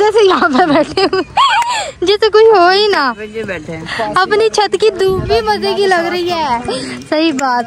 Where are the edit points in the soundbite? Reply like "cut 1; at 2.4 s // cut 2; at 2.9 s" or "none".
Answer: none